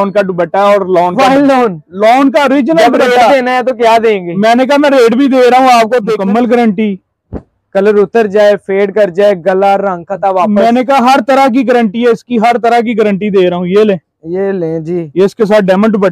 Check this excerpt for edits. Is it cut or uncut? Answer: cut